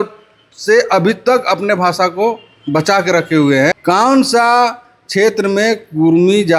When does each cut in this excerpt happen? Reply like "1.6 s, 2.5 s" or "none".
3.8 s